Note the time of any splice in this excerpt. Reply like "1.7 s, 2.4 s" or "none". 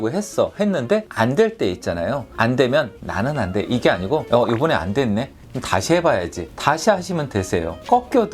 2.3 s

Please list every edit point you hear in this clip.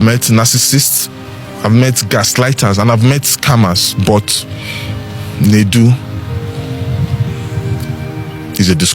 none

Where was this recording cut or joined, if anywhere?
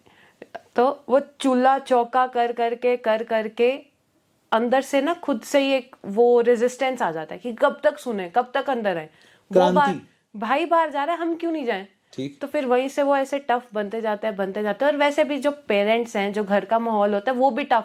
none

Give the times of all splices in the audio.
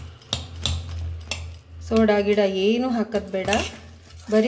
none

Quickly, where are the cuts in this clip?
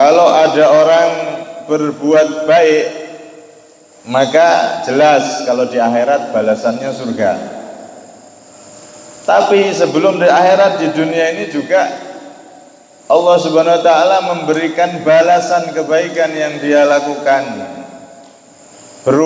none

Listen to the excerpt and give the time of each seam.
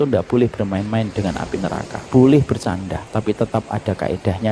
1.9 s, 3.0 s

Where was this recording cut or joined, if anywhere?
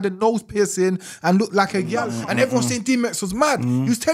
2.0 s

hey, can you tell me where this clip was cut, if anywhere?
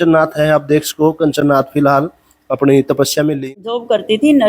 3.4 s

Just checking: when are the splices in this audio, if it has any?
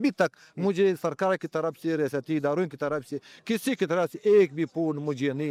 none

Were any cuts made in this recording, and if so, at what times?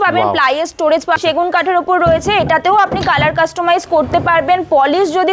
1.2 s

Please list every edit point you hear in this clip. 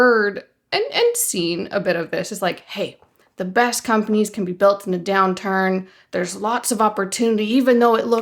none

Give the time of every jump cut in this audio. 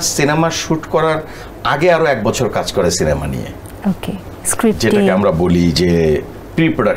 none

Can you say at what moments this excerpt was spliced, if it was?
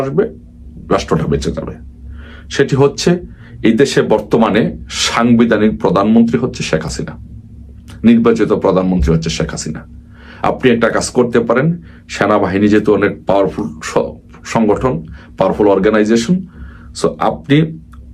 none

